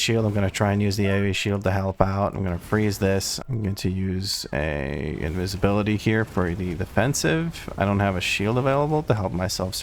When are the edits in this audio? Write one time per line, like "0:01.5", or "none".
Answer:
0:03.4